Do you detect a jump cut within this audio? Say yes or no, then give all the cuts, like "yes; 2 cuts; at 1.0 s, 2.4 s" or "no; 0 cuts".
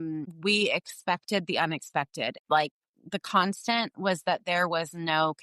yes; 1 cut; at 2.4 s